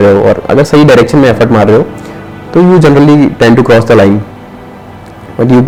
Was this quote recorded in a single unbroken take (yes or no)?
yes